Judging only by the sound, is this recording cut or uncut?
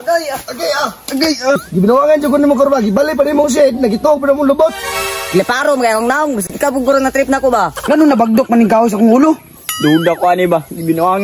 cut